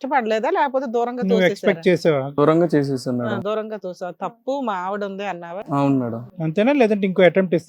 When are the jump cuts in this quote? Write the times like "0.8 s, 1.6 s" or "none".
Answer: none